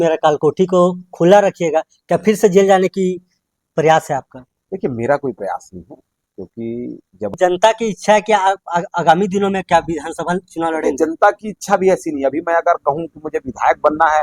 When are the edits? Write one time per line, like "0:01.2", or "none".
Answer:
0:07.3